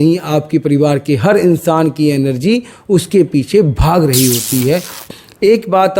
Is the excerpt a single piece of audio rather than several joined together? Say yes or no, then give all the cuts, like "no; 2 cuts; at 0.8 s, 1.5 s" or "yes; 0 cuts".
no; 1 cut; at 4.9 s